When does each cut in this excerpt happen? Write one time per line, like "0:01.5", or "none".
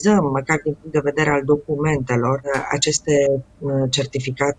0:02.5